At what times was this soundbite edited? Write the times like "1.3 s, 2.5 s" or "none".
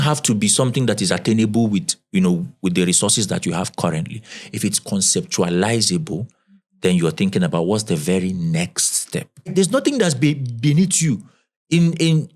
9.5 s